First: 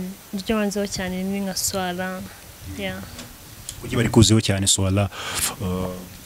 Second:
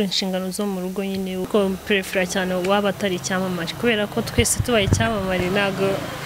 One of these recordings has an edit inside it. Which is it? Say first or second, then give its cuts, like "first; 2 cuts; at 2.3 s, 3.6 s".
second; 1 cut; at 1.5 s